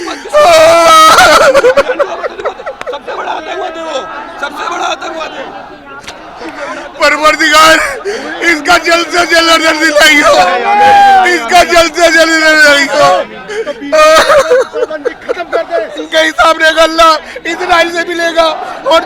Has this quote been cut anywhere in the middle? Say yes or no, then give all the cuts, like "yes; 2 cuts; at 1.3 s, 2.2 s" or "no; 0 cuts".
yes; 1 cut; at 16.0 s